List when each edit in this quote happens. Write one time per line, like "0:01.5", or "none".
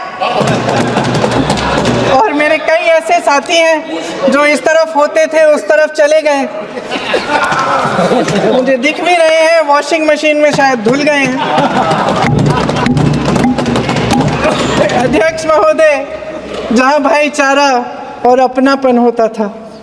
none